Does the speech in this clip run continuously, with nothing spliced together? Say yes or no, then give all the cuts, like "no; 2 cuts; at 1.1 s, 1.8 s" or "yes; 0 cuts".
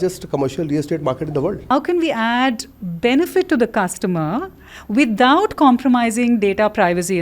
no; 1 cut; at 1.7 s